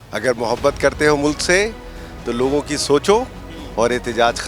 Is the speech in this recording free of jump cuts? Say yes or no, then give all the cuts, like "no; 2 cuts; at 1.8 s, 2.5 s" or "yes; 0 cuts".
yes; 0 cuts